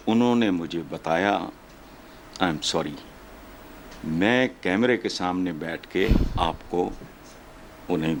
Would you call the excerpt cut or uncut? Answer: uncut